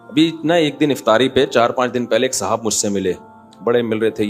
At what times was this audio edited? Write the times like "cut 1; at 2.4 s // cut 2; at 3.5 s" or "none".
none

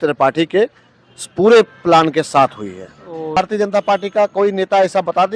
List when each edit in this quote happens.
cut 1; at 3.3 s

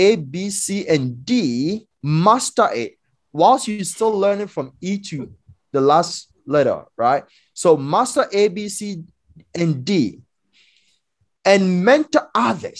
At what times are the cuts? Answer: cut 1; at 1.9 s

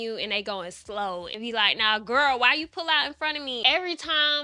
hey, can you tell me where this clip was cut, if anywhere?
cut 1; at 1.3 s // cut 2; at 3.6 s

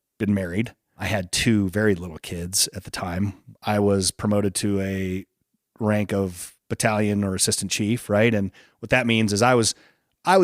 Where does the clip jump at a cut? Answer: cut 1; at 1.0 s // cut 2; at 3.5 s

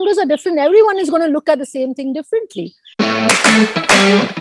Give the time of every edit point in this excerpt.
cut 1; at 2.8 s

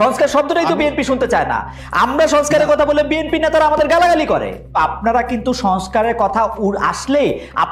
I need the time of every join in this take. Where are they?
cut 1; at 4.8 s

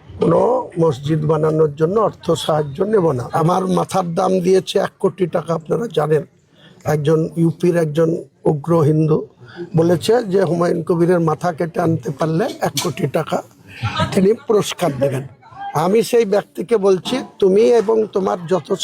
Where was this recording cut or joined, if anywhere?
cut 1; at 3.3 s

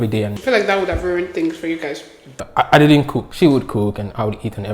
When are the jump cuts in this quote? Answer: cut 1; at 2.4 s // cut 2; at 3.2 s

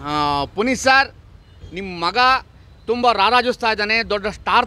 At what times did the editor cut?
none

